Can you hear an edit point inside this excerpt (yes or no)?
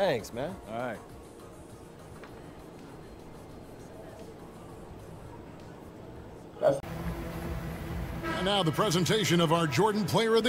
yes